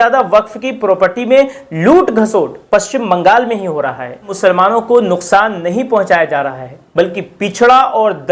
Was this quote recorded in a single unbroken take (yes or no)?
no